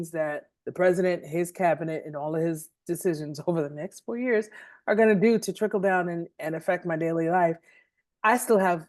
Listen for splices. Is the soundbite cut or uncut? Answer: uncut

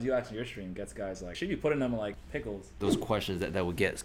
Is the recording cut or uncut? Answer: cut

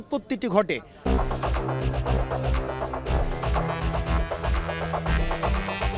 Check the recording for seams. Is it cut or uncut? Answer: uncut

